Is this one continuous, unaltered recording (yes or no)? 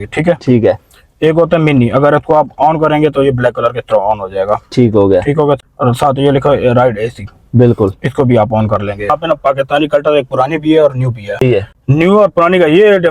no